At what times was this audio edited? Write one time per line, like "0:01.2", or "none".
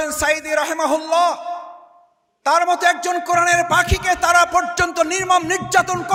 none